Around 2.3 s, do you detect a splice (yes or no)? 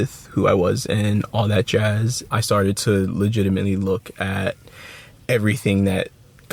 no